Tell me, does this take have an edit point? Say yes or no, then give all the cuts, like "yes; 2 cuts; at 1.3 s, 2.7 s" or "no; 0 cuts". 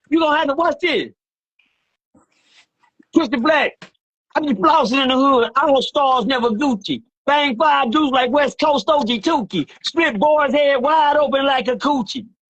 no; 0 cuts